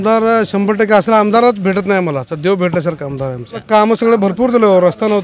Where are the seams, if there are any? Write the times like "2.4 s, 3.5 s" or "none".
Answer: 3.6 s